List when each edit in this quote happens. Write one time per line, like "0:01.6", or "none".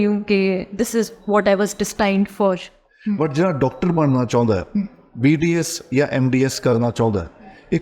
0:02.9